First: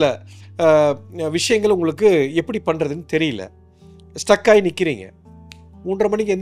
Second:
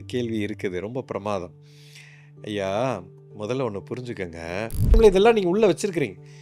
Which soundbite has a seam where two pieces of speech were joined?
second; 1 cut; at 5.0 s

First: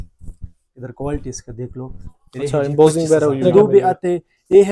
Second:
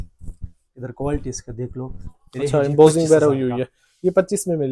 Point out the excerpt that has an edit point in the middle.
first; 1 cut; at 3.4 s

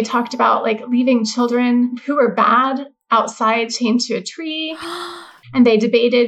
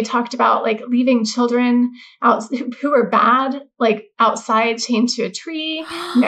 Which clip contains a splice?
first; 3 cuts; at 2.0 s, 3.0 s, 5.1 s

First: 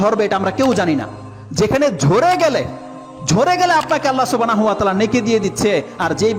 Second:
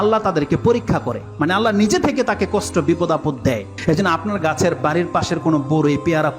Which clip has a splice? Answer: second; 1 cut; at 3.7 s

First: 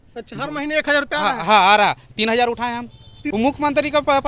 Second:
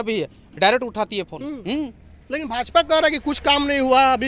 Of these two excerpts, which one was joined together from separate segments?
first; 1 cut; at 3.3 s

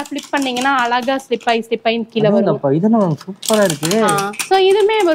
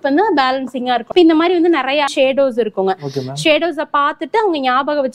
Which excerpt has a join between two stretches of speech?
second; 2 cuts; at 1.1 s, 2.1 s

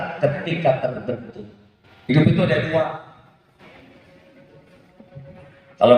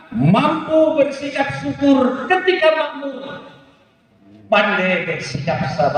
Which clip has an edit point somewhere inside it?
first; 1 cut; at 2.1 s

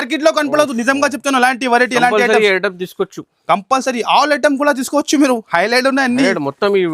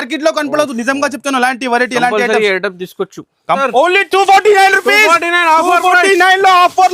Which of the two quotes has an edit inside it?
second; 1 cut; at 3.6 s

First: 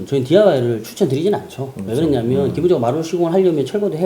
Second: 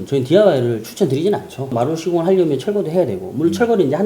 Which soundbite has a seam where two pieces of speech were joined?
second; 1 cut; at 1.7 s

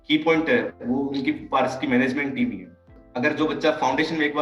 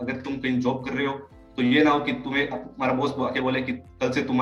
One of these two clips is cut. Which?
first; 1 cut; at 3.0 s

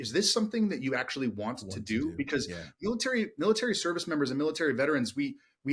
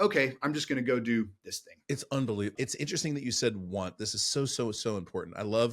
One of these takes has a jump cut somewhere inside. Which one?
second; 2 cuts; at 1.8 s, 2.5 s

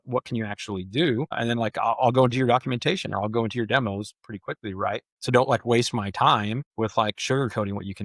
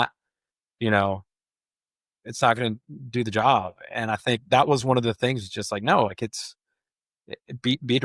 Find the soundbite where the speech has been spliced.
first; 1 cut; at 6.6 s

